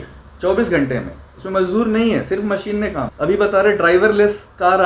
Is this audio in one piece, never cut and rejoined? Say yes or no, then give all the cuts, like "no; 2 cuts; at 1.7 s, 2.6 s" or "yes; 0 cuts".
no; 1 cut; at 3.1 s